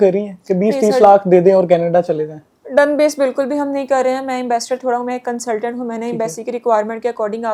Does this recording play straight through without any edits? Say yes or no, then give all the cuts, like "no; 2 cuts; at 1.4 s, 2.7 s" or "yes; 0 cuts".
yes; 0 cuts